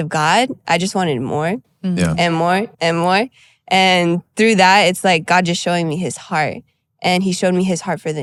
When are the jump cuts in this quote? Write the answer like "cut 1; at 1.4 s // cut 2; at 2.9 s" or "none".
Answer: none